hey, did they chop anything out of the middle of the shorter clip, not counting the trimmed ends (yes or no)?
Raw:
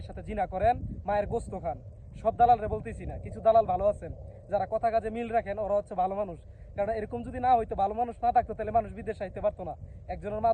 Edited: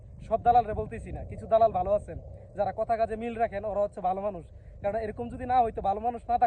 no